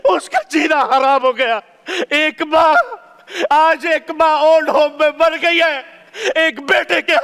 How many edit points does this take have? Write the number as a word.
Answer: zero